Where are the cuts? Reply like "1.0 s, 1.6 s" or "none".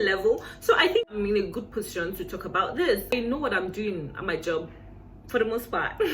1.0 s, 3.1 s